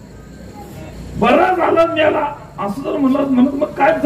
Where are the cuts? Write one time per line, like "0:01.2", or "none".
0:00.9